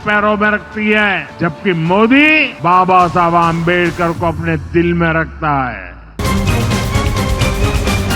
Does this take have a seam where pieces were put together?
yes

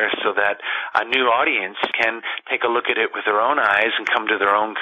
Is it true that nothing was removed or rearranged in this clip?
no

